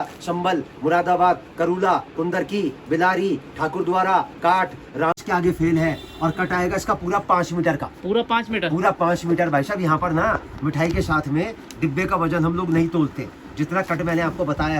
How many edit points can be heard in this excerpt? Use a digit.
1